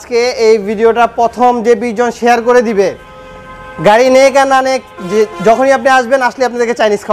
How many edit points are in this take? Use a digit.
0